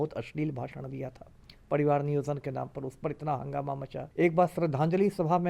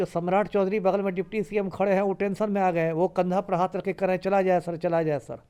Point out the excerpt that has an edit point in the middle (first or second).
first